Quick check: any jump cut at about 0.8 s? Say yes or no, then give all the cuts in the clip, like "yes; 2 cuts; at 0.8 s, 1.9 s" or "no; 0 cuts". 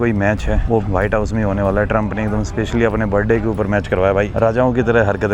yes; 2 cuts; at 0.8 s, 4.3 s